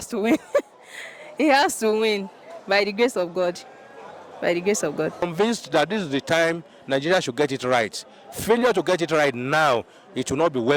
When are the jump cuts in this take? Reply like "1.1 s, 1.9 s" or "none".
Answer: 5.3 s